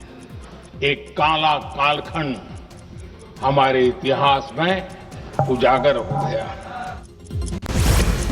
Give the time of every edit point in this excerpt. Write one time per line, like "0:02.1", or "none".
0:07.4